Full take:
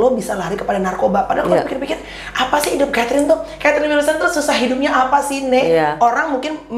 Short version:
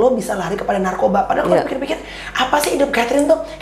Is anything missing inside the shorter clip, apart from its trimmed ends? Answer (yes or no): no